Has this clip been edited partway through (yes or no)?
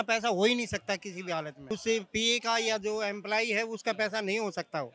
no